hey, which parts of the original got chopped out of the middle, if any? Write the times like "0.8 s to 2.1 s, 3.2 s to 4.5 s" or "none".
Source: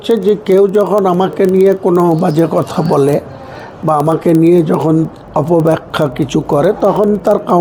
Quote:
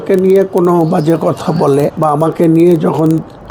3.2 s to 3.8 s